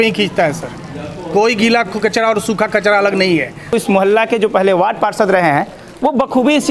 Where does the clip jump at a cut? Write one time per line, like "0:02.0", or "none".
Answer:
none